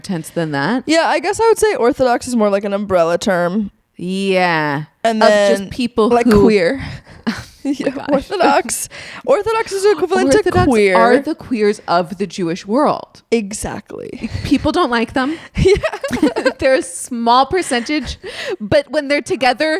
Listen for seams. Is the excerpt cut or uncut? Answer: uncut